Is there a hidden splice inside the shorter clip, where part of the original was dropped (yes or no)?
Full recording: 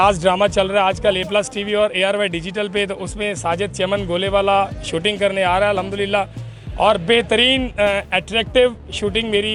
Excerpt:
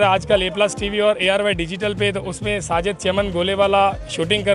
no